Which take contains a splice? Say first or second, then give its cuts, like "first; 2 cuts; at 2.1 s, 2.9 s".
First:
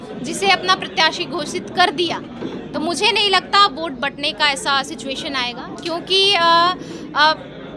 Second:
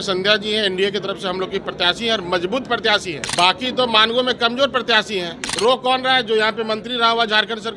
second; 2 cuts; at 3.2 s, 5.4 s